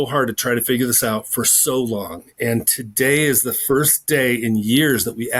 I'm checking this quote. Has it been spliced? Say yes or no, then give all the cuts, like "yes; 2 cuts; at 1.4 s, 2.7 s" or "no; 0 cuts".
no; 0 cuts